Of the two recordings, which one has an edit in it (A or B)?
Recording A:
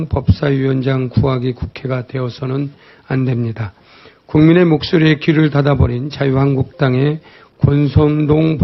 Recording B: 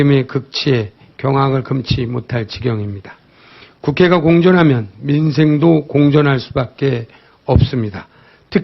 B